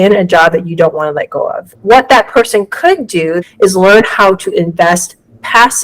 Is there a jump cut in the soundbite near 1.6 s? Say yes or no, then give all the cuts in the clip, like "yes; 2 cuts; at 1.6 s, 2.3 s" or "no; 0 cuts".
yes; 2 cuts; at 1.6 s, 3.4 s